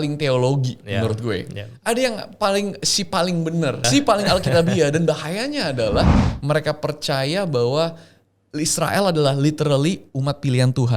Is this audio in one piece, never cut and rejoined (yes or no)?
no